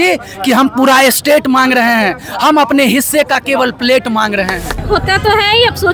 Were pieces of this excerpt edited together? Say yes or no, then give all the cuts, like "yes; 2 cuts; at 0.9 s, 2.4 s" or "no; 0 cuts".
yes; 1 cut; at 4.7 s